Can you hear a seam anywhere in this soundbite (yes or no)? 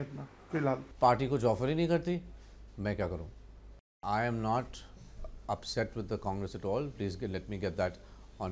yes